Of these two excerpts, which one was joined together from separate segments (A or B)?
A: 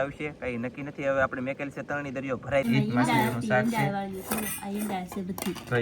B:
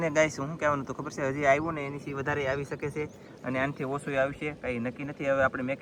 A